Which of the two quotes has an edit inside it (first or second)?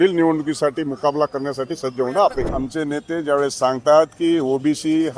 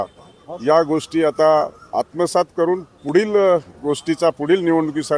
first